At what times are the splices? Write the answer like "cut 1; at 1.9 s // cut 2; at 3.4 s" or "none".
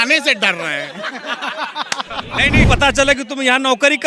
cut 1; at 2.7 s